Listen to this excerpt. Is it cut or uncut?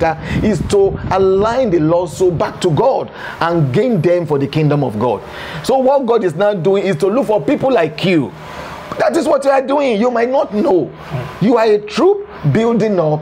cut